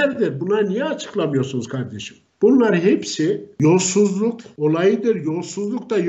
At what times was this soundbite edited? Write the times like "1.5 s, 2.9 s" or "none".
4.5 s